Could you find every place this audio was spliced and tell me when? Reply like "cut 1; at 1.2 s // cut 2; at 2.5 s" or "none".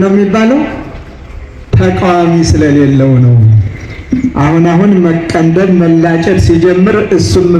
none